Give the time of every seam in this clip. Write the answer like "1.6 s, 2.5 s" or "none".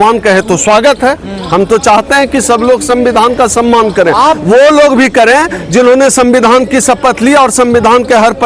none

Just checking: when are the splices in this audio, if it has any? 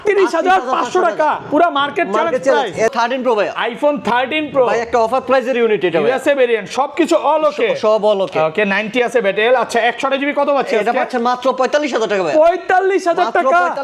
2.9 s

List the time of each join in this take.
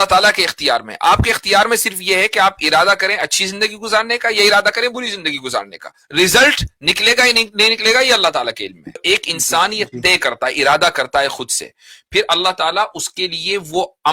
9.0 s

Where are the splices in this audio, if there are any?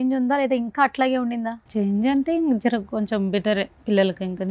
1.6 s

